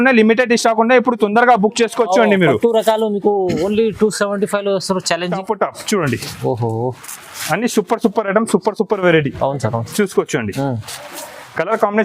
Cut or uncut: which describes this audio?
cut